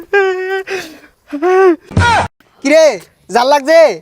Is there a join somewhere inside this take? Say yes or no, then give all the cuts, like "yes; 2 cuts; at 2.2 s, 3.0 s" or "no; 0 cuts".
yes; 1 cut; at 2.5 s